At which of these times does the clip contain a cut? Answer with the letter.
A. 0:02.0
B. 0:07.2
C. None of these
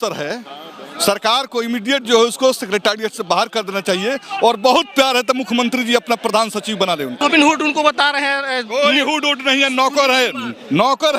B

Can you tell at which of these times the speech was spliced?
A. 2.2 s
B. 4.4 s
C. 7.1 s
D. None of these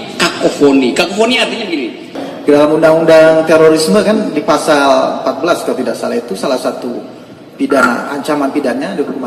A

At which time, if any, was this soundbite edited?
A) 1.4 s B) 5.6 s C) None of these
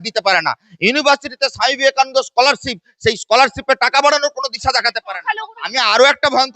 B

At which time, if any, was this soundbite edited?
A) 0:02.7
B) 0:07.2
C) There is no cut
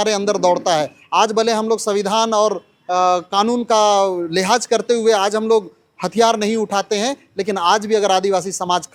C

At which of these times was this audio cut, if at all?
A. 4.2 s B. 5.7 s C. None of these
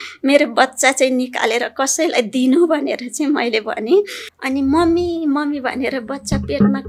A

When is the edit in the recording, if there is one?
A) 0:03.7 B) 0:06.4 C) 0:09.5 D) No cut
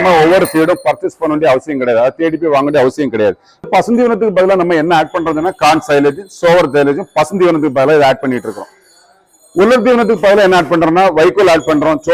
A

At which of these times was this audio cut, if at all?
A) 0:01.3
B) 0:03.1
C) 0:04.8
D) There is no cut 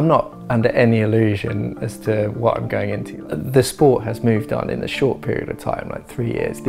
B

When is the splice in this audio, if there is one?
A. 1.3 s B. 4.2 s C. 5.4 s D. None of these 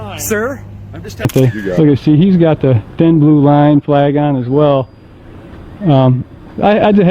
A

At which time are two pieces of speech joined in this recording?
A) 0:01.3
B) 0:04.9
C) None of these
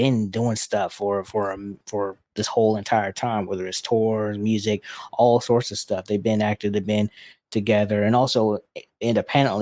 C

